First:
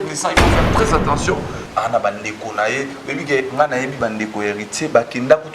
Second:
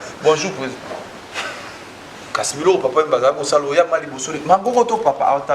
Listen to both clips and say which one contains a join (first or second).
first